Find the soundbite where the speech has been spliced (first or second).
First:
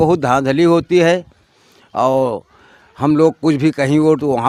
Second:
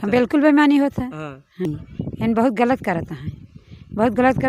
second